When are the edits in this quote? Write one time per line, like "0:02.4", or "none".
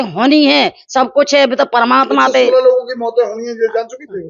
none